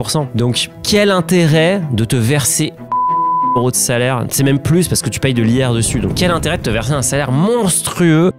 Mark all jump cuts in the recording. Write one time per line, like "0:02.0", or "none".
none